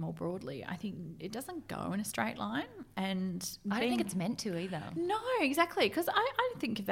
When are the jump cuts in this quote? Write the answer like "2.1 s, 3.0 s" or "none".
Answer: none